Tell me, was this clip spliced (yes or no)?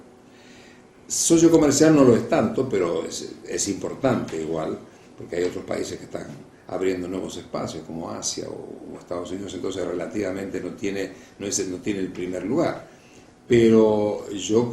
yes